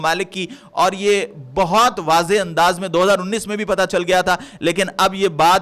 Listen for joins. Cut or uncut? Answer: uncut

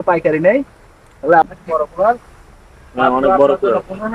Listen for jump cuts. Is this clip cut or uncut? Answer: cut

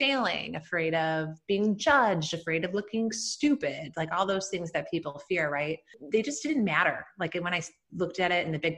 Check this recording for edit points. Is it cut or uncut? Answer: cut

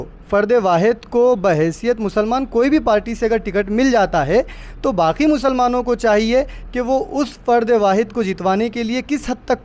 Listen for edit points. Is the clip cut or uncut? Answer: uncut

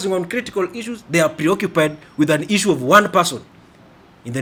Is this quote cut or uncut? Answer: uncut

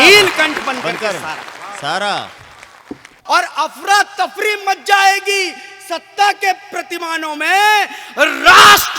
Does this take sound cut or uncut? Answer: cut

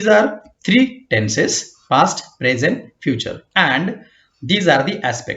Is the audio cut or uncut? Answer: cut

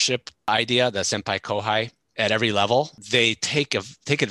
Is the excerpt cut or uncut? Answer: cut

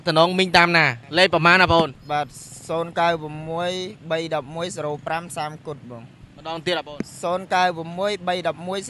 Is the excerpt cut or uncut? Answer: uncut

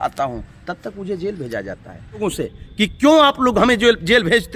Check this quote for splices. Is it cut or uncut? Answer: cut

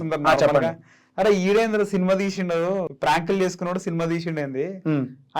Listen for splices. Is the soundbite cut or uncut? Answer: cut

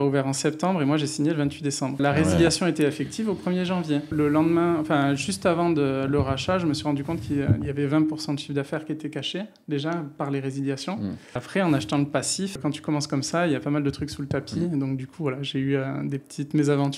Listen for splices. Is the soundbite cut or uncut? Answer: cut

